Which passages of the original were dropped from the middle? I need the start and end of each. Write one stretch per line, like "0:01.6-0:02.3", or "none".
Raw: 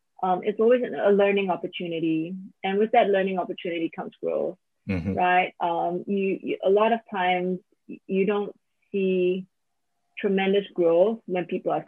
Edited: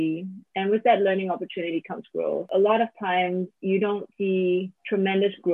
0:04.5-0:06.6
0:07.7-0:08.0
0:08.7-0:09.6